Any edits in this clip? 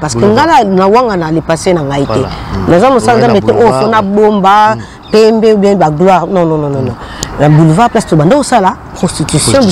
no; 0 cuts

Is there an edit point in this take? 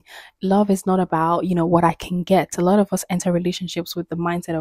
no; 0 cuts

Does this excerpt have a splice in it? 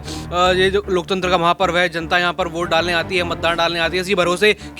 no; 0 cuts

